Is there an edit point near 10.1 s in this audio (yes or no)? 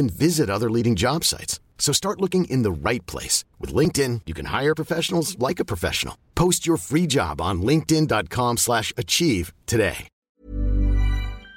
yes